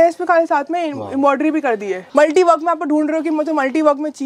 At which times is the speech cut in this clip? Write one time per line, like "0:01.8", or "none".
0:02.0